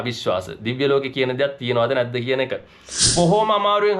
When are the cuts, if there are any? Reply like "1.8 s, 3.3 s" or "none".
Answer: 3.0 s